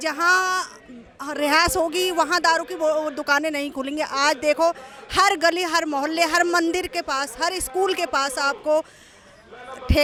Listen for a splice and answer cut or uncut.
uncut